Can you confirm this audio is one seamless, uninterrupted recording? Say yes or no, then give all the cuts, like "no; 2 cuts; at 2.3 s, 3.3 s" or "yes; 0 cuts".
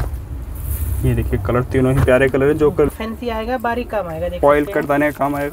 no; 1 cut; at 2.9 s